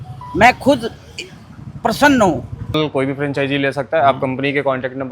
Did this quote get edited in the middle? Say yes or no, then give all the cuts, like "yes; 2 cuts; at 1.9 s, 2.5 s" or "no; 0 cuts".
yes; 1 cut; at 2.8 s